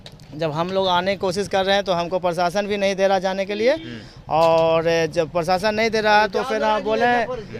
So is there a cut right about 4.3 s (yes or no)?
no